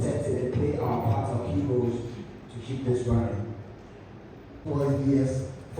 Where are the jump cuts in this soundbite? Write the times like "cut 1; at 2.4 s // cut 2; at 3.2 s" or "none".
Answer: cut 1; at 4.7 s